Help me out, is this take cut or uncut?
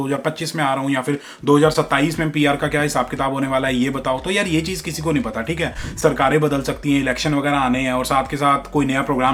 uncut